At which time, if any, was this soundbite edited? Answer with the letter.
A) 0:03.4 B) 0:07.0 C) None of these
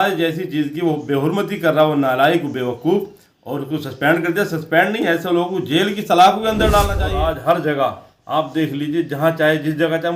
B